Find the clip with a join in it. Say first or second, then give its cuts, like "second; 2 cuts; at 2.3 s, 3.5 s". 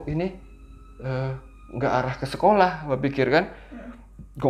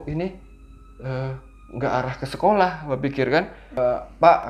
second; 1 cut; at 3.6 s